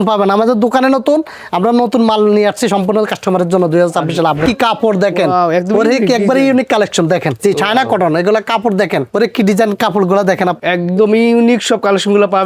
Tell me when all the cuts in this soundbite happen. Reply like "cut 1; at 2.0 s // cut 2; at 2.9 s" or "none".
cut 1; at 4.4 s // cut 2; at 7.4 s // cut 3; at 9.1 s // cut 4; at 10.6 s

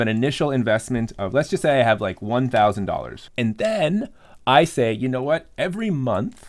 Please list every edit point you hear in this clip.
cut 1; at 3.2 s

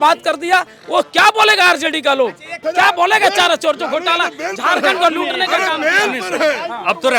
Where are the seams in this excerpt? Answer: cut 1; at 2.5 s

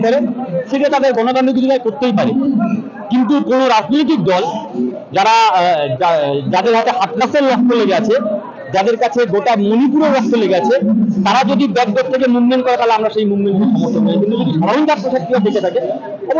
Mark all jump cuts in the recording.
none

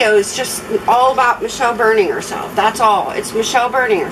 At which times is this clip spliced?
none

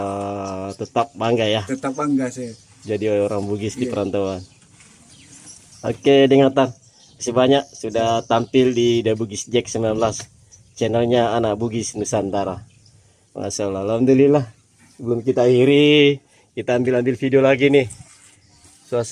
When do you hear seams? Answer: none

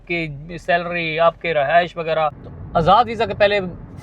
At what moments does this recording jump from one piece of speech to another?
cut 1; at 2.5 s

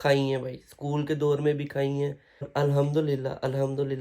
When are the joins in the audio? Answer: cut 1; at 2.5 s

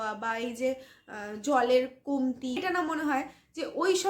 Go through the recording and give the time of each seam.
cut 1; at 2.6 s

